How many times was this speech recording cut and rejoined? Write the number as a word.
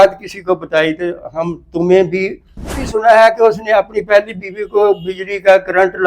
one